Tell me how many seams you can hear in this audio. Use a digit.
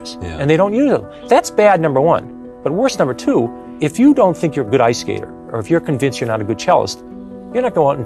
2